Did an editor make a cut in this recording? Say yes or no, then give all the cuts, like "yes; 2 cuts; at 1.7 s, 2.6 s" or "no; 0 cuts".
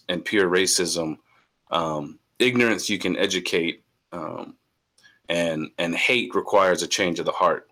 no; 0 cuts